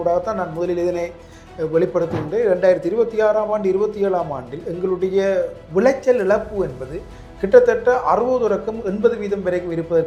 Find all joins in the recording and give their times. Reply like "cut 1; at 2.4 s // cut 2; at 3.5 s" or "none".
none